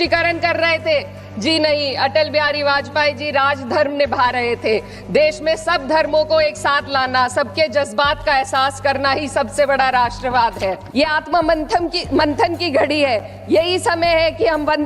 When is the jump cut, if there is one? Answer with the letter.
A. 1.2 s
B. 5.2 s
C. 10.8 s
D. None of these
C